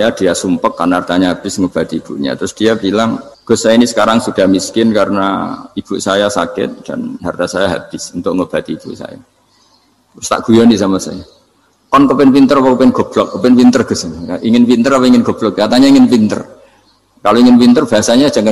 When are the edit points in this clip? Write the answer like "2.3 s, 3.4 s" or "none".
3.3 s

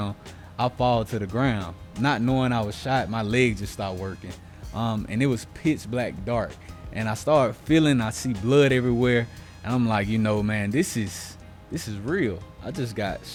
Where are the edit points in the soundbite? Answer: none

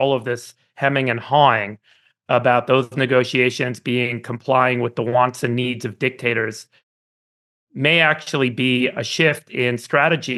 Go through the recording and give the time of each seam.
none

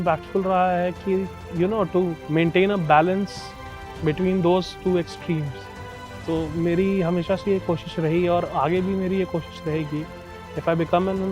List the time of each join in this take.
1.4 s, 2.2 s

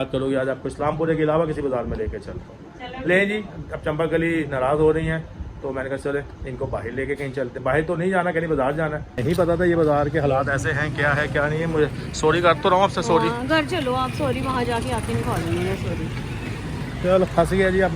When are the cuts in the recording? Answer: 9.2 s

